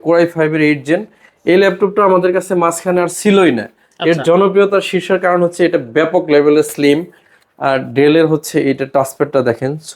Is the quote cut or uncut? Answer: uncut